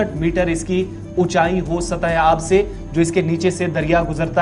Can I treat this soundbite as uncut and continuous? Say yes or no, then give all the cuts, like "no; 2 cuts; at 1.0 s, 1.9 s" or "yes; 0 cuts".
yes; 0 cuts